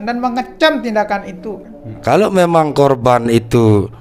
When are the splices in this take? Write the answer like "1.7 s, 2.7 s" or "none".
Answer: 2.0 s